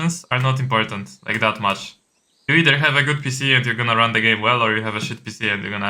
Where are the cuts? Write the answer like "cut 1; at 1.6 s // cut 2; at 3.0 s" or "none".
none